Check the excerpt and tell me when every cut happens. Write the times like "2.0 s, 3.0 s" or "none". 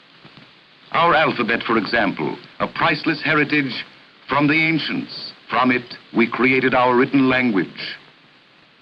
none